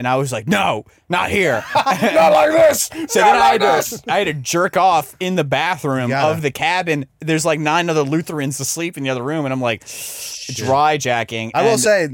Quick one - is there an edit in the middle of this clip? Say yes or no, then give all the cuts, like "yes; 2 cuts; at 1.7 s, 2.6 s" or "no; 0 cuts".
no; 0 cuts